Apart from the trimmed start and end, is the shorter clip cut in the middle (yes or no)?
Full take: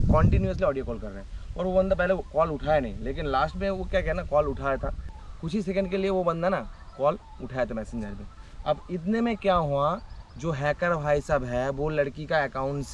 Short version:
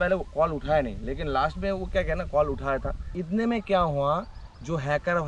yes